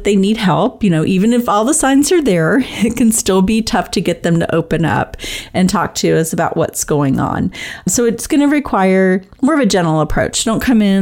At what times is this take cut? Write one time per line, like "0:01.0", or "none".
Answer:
0:07.9